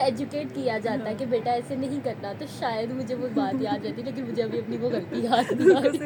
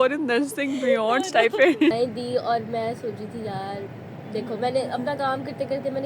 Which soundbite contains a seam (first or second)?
second